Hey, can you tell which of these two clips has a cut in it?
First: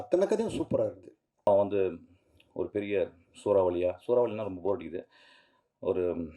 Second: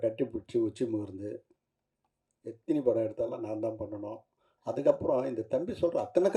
first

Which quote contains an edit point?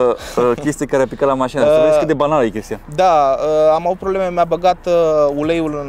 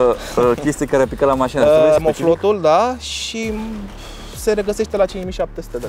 second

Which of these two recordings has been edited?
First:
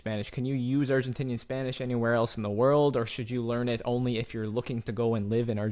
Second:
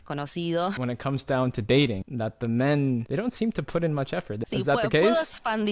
second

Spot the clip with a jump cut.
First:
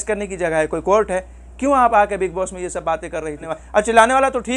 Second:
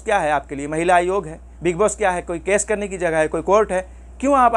first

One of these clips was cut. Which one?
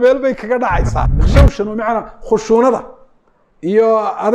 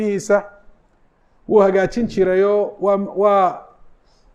first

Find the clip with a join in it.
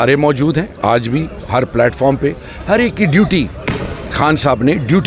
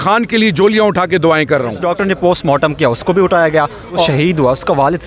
second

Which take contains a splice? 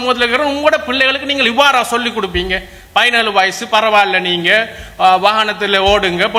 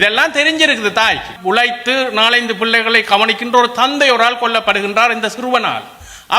second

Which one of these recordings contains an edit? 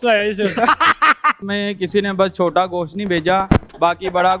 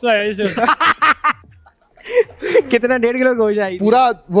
first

